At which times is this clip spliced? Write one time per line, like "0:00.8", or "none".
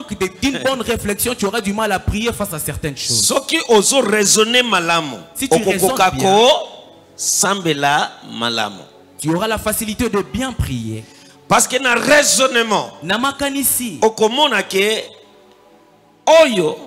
none